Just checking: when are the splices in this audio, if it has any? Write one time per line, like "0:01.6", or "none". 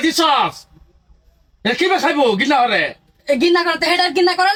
none